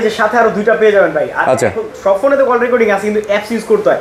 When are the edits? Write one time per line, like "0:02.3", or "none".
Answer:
none